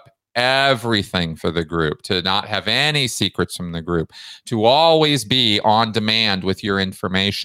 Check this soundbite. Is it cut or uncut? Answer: uncut